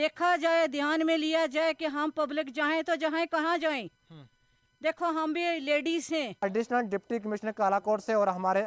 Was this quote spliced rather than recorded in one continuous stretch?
yes; 1 cut; at 6.4 s

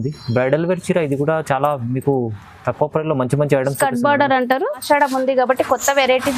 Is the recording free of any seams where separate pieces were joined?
no; 1 cut; at 4.8 s

